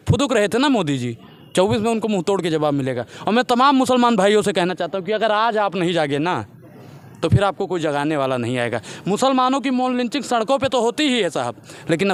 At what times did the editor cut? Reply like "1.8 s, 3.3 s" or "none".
none

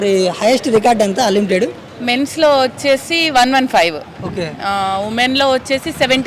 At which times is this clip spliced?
none

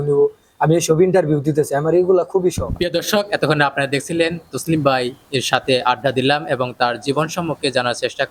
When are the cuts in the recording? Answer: none

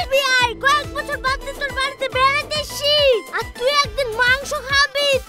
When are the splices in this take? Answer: none

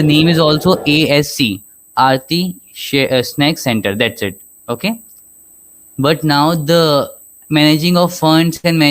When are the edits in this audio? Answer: none

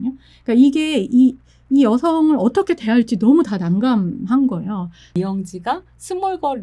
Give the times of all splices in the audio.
5.1 s

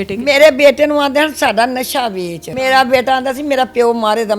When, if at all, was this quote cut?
2.5 s

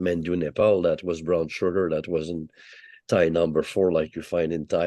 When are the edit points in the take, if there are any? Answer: none

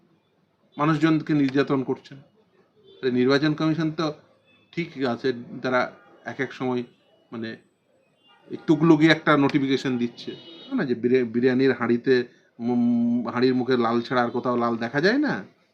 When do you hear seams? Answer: 10.7 s

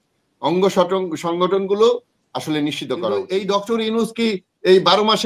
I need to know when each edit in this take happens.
3.2 s

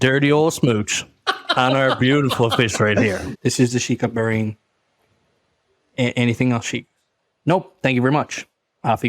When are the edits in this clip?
3.3 s

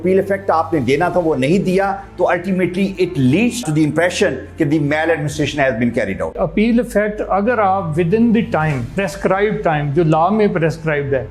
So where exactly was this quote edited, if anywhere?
6.3 s

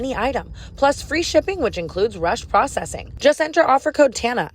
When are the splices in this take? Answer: 3.0 s

